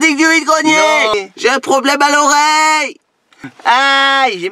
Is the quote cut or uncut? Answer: cut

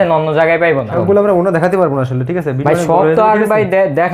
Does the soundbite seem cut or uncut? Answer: cut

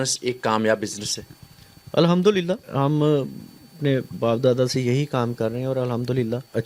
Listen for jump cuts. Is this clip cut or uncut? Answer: uncut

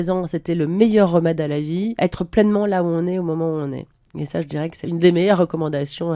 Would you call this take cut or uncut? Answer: cut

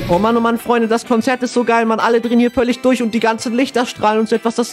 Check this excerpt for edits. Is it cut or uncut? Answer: uncut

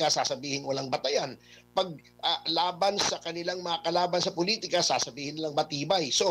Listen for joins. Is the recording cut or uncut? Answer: uncut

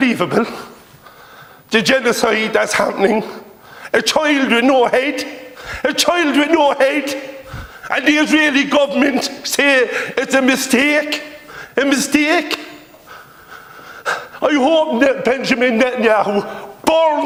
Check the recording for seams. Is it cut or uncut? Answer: uncut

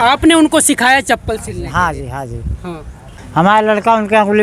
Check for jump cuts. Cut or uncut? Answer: cut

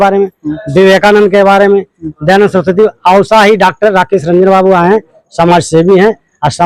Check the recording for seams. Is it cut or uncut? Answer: uncut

